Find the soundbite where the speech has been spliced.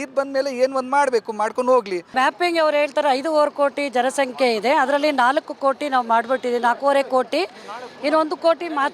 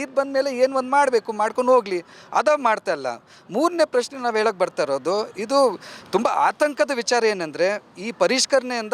first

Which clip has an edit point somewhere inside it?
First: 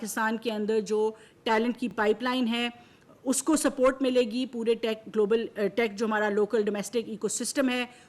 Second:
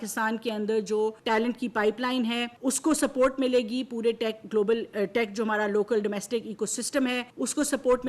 second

